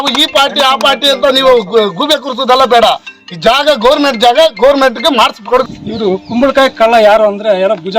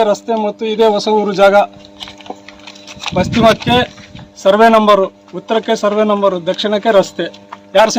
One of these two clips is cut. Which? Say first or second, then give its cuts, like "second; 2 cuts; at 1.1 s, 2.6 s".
first; 1 cut; at 5.6 s